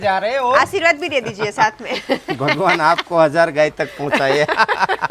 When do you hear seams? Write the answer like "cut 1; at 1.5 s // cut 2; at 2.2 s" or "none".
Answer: none